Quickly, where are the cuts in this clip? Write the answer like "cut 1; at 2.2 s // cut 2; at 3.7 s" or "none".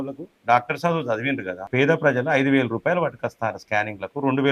cut 1; at 1.7 s